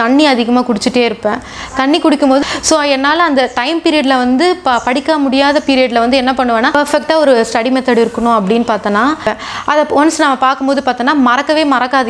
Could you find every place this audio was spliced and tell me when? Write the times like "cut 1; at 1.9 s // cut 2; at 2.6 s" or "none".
cut 1; at 2.4 s // cut 2; at 6.7 s // cut 3; at 9.3 s